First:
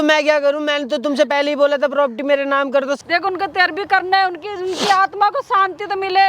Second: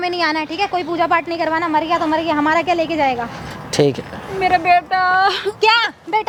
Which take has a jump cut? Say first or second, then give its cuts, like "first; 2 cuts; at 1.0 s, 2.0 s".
first; 1 cut; at 3.0 s